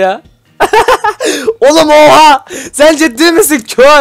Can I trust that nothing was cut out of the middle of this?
yes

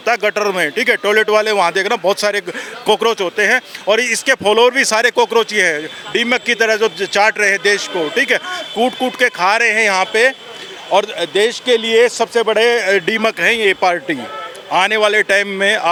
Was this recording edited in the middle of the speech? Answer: no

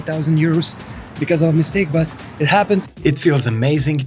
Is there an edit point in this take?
yes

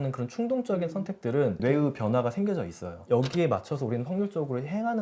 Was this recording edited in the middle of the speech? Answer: yes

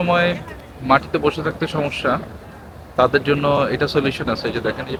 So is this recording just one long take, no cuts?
yes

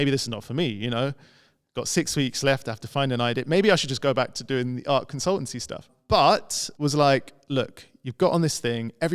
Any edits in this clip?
yes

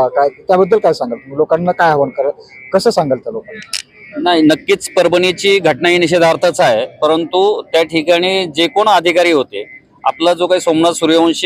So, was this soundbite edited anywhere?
no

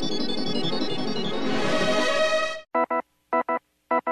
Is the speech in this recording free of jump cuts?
no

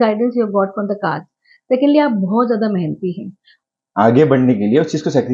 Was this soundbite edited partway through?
yes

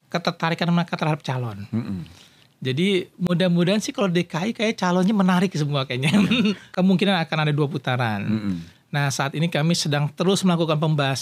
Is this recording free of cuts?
no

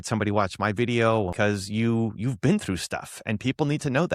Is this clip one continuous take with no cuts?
no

